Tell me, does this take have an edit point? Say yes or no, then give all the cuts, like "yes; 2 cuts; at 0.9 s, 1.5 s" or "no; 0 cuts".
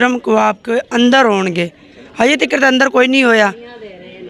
no; 0 cuts